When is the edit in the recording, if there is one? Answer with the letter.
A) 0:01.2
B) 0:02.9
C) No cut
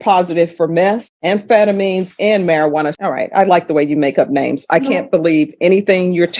B